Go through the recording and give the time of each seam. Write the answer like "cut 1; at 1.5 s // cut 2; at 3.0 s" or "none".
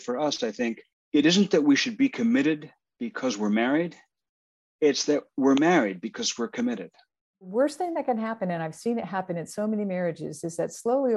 cut 1; at 0.9 s // cut 2; at 7.5 s